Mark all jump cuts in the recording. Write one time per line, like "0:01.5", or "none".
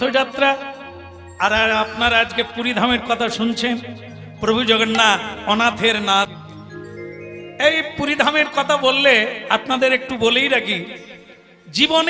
0:06.3